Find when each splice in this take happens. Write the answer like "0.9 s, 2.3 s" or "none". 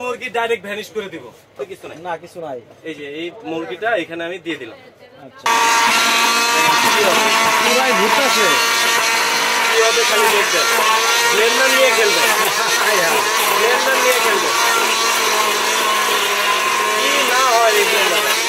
1.6 s, 5.5 s

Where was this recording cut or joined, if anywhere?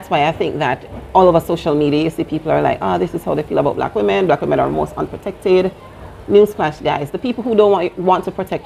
0.9 s

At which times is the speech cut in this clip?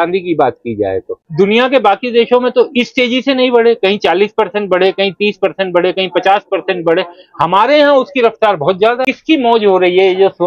1.2 s, 9.0 s

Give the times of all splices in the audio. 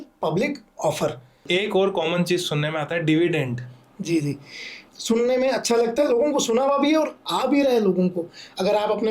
1.4 s, 4.8 s

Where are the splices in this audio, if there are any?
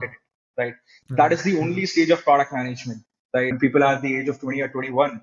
3.6 s

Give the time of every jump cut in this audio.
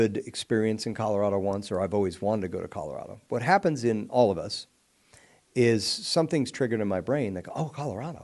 none

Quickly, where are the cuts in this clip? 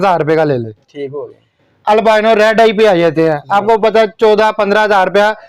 none

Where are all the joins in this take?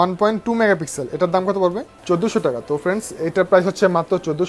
1.9 s

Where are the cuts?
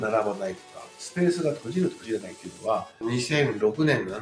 none

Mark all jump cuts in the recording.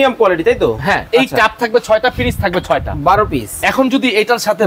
1.0 s

